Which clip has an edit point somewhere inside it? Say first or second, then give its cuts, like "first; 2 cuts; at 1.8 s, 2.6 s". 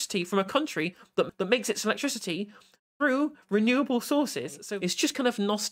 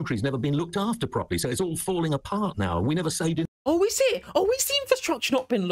first; 2 cuts; at 1.3 s, 4.6 s